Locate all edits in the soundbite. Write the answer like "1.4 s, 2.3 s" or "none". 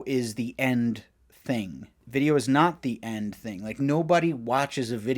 2.0 s